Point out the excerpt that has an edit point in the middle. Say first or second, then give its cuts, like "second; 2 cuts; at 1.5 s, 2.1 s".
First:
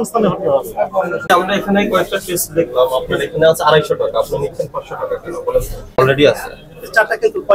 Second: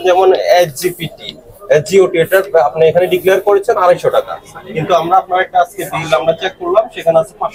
first; 2 cuts; at 1.3 s, 6.0 s